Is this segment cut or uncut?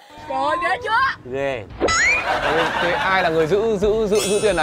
cut